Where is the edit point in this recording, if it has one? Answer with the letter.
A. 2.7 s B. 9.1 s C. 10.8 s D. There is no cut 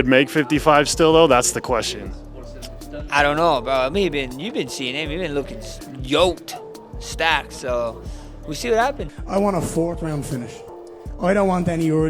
B